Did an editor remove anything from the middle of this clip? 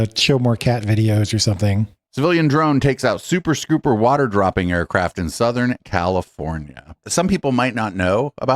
yes; 2 cuts; at 2.0 s, 7.1 s

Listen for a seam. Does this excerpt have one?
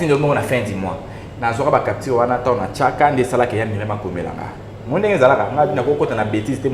no; 0 cuts

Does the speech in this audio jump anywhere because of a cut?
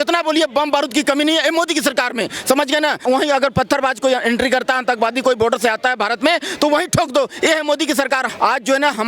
yes; 2 cuts; at 3.0 s, 8.3 s

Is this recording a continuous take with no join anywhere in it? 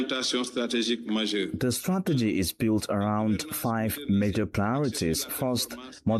yes; 0 cuts

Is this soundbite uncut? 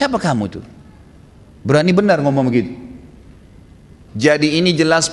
no; 1 cut; at 4.0 s

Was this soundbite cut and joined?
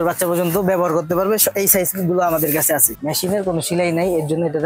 yes; 1 cut; at 3.0 s

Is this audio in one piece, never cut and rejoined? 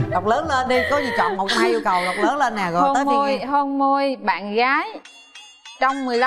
yes; 0 cuts

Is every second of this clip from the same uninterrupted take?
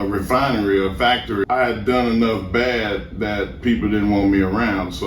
no; 1 cut; at 1.4 s

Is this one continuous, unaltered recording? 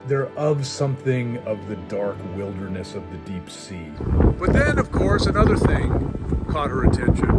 no; 1 cut; at 4.0 s

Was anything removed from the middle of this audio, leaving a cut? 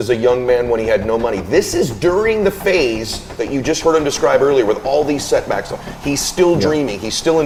no; 0 cuts

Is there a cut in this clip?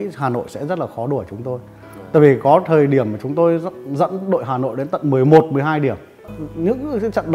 yes; 1 cut; at 6.2 s

